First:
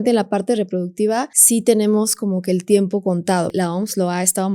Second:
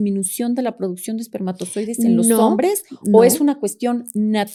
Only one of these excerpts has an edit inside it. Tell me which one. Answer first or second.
first